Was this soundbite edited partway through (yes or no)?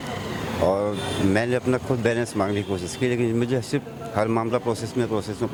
no